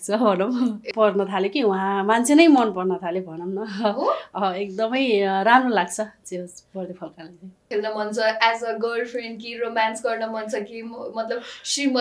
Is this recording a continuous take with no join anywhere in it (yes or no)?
no